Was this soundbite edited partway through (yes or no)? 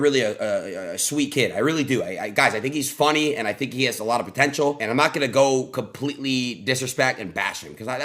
yes